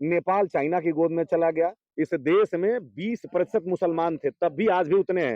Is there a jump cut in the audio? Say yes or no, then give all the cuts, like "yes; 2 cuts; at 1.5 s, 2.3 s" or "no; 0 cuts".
yes; 1 cut; at 1.8 s